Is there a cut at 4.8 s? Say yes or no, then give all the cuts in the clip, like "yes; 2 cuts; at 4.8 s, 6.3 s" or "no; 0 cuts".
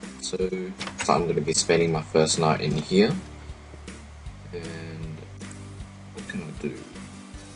yes; 1 cut; at 4.8 s